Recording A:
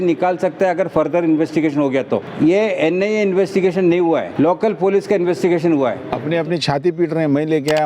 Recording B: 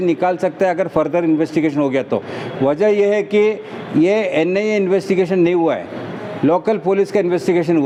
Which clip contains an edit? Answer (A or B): A